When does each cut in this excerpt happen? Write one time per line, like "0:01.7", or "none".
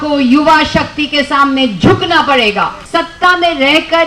0:02.8